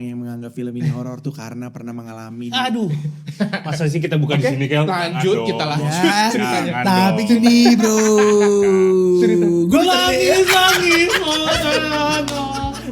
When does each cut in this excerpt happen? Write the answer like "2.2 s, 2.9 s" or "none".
none